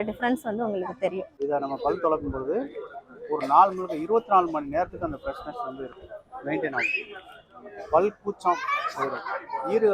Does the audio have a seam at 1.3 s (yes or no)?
yes